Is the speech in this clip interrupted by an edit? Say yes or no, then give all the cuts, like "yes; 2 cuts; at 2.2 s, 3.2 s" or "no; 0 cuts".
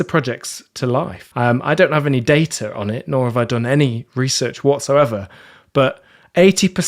yes; 1 cut; at 1.2 s